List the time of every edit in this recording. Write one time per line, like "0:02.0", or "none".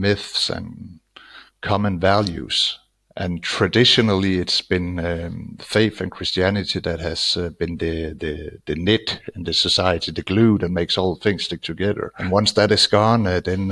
0:03.2
0:12.2

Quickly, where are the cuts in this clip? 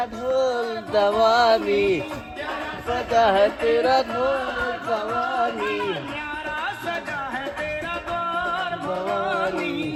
none

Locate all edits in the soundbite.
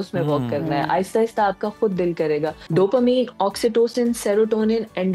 0:02.6

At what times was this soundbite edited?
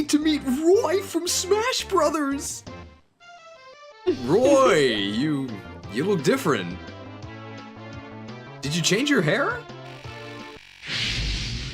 0:10.7

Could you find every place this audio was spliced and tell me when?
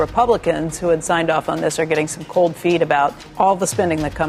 0:03.2

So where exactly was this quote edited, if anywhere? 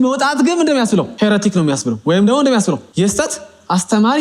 0:01.1
0:02.9

